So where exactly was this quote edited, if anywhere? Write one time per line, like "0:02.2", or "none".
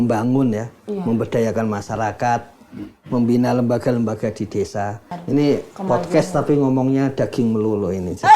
0:05.1